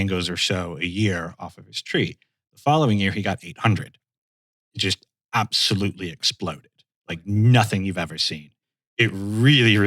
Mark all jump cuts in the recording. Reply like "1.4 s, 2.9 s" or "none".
8.6 s